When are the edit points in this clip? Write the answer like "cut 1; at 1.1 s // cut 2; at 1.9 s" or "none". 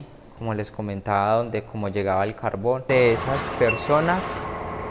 cut 1; at 2.8 s